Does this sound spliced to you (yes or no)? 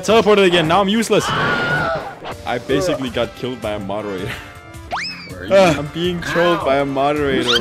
yes